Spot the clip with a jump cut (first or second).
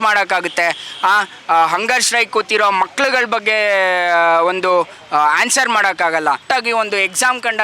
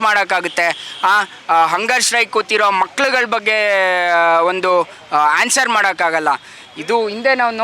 first